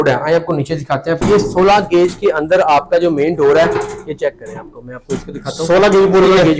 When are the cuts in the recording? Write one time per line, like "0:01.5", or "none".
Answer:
0:01.2